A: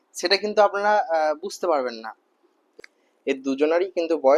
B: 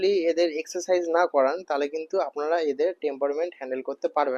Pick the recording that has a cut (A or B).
A